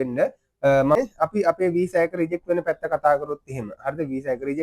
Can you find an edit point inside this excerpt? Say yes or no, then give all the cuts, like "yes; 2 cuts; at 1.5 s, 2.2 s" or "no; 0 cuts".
yes; 1 cut; at 1.0 s